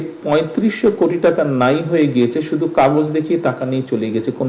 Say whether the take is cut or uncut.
uncut